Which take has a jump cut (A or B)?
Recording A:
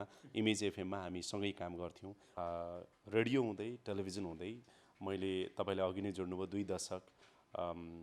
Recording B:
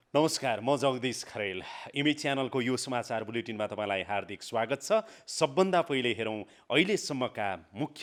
A